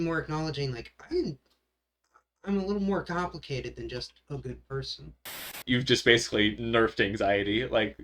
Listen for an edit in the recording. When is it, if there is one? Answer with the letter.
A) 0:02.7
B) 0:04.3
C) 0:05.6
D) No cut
C